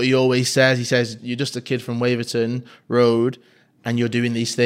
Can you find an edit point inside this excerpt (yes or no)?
yes